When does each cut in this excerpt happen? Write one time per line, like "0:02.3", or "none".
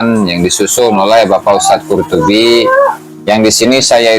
0:03.1